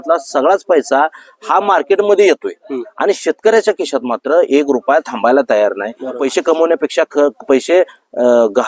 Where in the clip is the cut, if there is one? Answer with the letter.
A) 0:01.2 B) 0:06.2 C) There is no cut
B